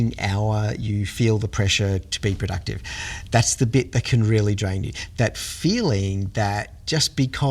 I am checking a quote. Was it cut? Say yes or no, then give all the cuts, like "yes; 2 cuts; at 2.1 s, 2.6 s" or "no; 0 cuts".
no; 0 cuts